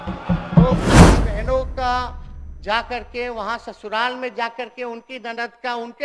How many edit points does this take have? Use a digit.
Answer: 1